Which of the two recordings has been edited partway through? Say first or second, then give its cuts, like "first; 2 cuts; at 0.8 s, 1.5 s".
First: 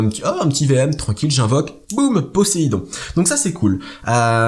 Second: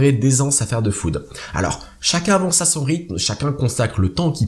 second; 1 cut; at 1.6 s